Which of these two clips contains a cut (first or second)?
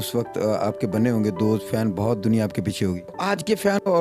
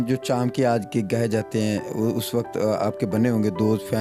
first